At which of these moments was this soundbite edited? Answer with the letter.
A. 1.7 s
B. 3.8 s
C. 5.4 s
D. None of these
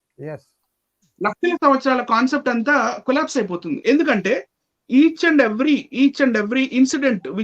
B